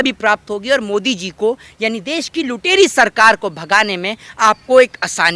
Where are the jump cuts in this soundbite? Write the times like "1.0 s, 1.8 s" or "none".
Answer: none